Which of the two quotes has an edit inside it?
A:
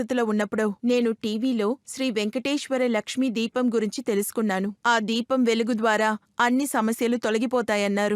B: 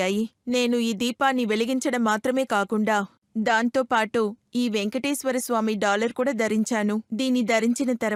A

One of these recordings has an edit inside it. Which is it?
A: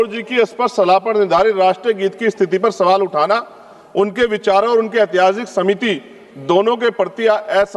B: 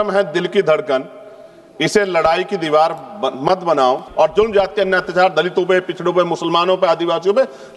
B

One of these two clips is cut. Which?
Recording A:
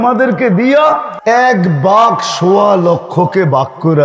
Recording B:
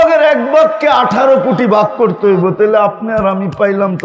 A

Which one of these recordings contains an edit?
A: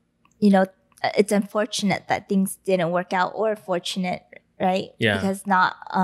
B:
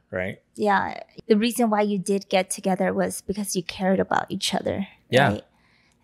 B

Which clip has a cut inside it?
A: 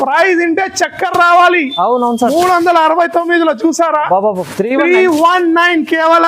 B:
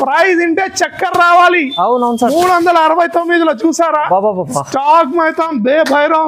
A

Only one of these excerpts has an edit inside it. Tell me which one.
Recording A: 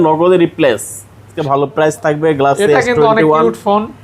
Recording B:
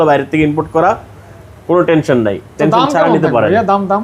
A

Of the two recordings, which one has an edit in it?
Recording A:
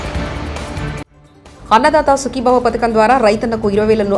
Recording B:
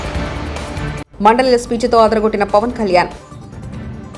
B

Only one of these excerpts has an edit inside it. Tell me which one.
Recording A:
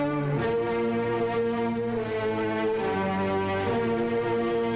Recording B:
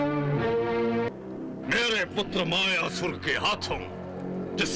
B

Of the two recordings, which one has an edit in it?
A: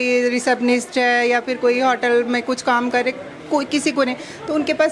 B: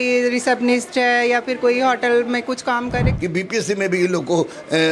B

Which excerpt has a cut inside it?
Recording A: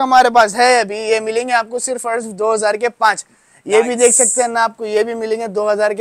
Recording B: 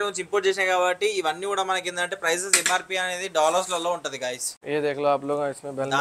B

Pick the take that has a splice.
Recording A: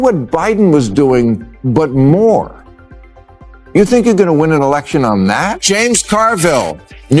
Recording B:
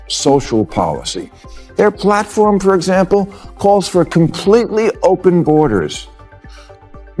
A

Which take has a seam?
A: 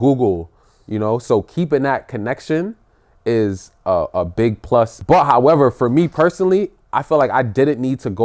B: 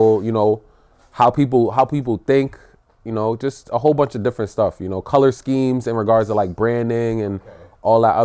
A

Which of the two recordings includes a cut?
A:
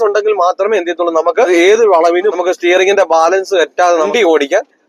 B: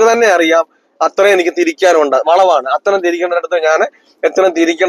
A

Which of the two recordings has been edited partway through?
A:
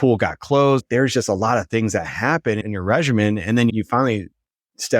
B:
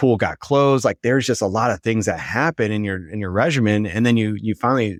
A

